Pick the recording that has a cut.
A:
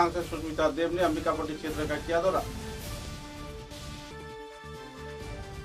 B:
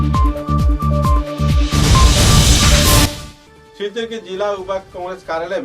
B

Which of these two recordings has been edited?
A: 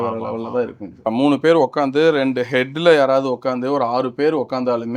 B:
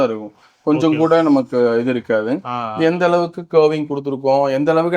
A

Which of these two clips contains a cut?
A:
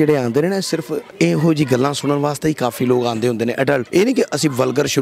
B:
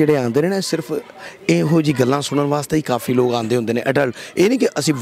A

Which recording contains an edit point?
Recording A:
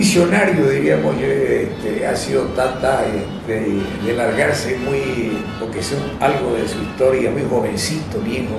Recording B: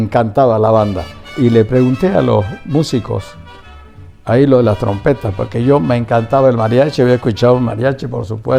B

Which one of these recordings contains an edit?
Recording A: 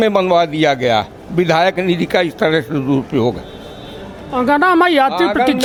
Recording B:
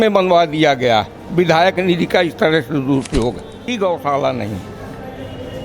B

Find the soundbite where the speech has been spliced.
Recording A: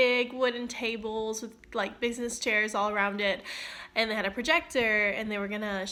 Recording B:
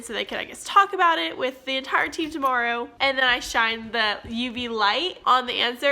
B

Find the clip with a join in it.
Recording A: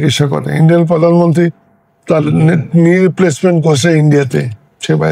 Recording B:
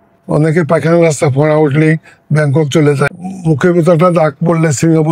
B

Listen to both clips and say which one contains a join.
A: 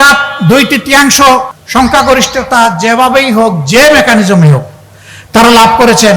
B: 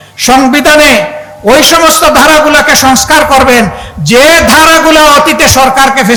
A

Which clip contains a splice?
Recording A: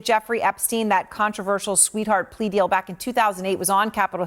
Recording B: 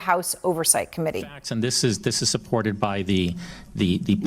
B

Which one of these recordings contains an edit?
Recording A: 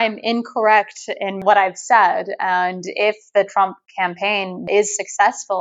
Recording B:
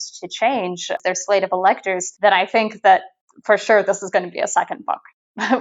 B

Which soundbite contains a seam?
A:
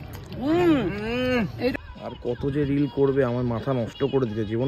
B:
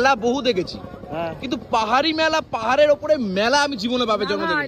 A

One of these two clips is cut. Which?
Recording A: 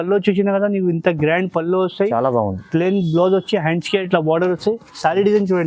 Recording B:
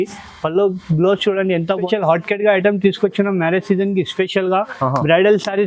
B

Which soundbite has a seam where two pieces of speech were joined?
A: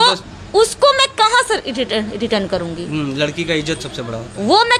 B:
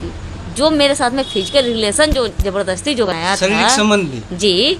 B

